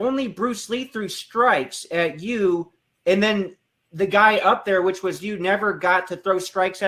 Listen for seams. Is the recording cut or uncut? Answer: uncut